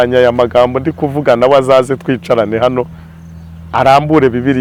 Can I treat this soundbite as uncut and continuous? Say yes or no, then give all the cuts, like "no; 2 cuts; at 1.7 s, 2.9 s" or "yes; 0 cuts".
yes; 0 cuts